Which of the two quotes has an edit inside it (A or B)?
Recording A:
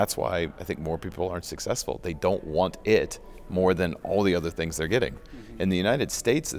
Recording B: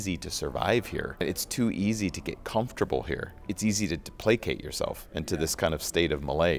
B